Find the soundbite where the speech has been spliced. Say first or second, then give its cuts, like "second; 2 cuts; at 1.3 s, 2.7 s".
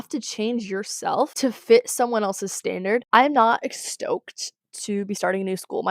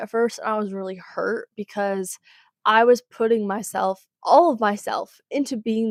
first; 2 cuts; at 1.3 s, 3.0 s